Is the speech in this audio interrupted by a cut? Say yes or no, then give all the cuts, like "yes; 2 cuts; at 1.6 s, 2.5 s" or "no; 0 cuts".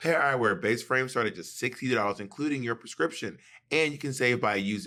no; 0 cuts